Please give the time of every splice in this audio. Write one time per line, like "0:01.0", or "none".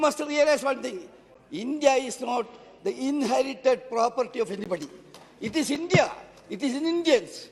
none